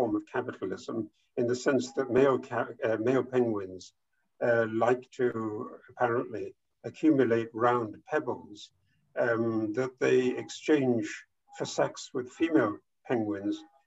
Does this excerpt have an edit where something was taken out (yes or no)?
no